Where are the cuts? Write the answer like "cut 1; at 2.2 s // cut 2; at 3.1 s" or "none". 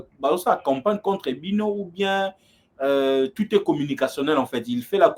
none

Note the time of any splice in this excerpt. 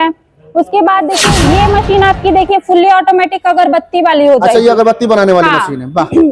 cut 1; at 1.3 s

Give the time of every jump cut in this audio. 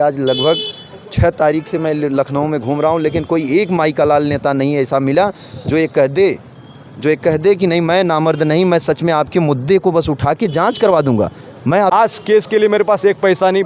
cut 1; at 11.9 s

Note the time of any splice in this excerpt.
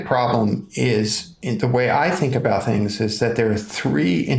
none

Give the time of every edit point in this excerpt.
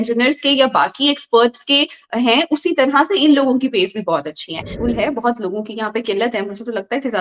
cut 1; at 4.7 s

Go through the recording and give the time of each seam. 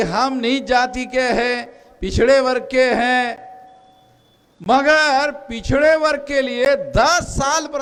none

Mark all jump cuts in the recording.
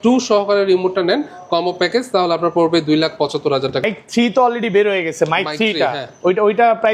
cut 1; at 3.8 s

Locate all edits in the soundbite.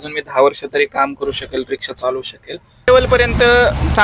cut 1; at 2.9 s

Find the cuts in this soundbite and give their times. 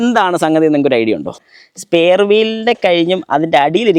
cut 1; at 1.4 s

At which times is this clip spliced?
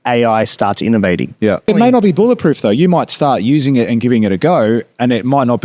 cut 1; at 1.7 s

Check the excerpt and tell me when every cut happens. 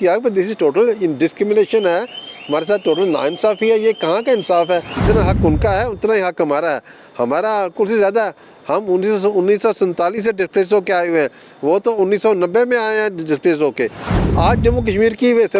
cut 1; at 4.9 s // cut 2; at 14.1 s

